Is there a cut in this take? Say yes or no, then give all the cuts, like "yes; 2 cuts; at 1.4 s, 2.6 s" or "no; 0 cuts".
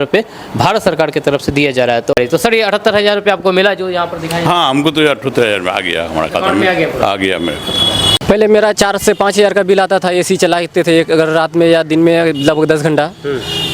yes; 2 cuts; at 2.1 s, 8.1 s